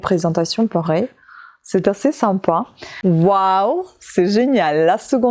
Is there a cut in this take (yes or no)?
yes